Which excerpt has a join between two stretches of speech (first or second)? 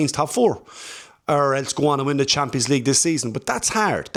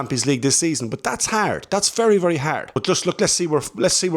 second